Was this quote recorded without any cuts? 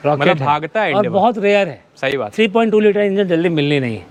yes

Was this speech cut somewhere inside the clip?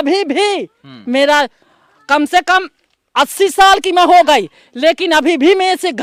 no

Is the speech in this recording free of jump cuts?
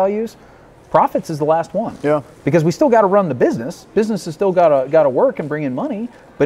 yes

